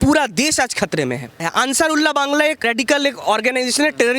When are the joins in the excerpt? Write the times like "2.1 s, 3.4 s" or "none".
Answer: 1.4 s, 2.6 s